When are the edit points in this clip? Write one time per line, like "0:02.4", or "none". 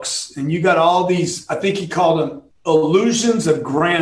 0:02.5